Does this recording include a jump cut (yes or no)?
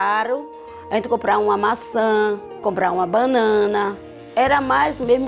yes